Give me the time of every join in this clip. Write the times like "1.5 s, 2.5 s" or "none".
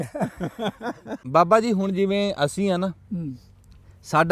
1.2 s